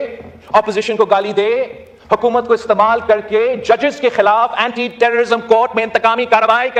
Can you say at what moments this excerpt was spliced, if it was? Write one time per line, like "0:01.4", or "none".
none

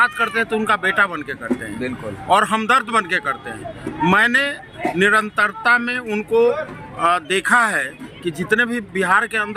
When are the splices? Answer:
none

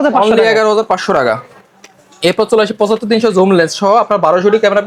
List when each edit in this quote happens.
none

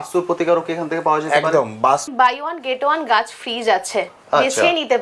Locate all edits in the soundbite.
0:02.1

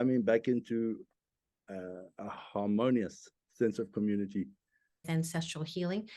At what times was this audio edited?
0:05.0

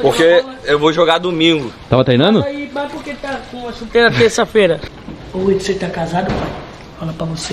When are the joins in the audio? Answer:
0:04.8

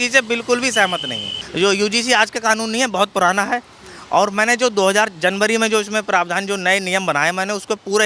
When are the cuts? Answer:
0:01.4

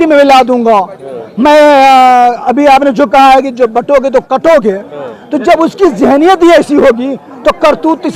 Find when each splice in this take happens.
none

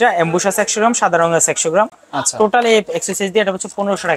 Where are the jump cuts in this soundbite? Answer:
none

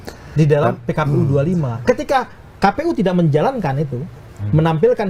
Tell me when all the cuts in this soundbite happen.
none

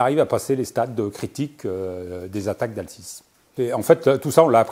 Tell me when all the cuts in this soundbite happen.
none

